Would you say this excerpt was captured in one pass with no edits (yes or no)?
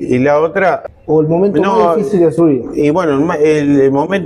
no